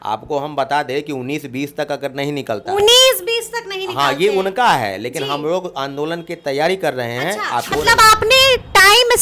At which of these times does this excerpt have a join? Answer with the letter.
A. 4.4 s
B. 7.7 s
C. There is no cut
B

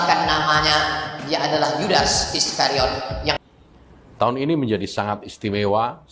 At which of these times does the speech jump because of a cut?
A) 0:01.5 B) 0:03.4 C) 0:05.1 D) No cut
B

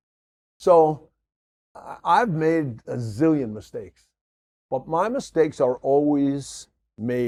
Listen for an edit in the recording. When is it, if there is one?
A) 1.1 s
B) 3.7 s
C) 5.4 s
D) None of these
D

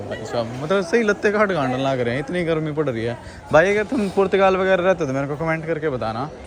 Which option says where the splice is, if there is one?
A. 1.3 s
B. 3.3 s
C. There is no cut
C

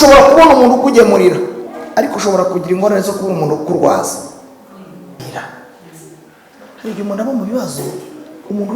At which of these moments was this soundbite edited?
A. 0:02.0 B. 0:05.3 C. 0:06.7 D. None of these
B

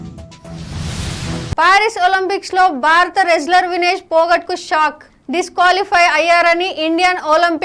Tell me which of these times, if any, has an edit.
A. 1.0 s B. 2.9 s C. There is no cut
A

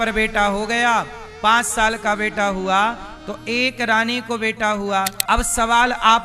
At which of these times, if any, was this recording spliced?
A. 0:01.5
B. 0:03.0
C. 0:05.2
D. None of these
C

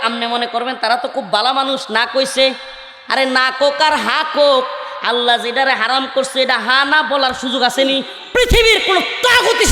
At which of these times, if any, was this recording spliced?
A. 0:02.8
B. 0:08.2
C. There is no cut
B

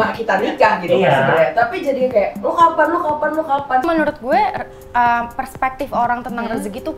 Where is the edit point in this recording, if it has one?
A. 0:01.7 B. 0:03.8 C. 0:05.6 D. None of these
B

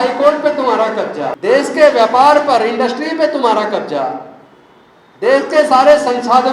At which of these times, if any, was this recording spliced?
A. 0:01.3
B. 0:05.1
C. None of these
A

